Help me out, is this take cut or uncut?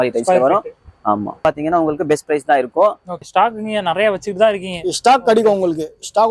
cut